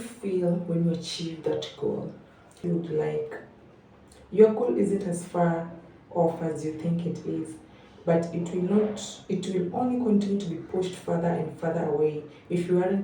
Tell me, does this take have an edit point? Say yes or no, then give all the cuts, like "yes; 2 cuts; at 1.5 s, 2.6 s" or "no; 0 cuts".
yes; 1 cut; at 2.6 s